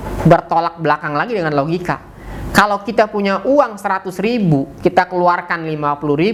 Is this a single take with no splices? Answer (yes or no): yes